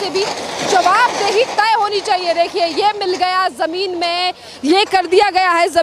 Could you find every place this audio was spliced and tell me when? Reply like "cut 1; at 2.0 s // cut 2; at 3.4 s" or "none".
none